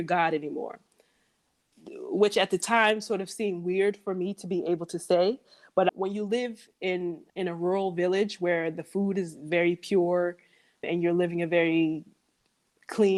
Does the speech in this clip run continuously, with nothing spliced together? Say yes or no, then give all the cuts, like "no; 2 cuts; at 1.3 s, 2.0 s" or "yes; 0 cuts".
yes; 0 cuts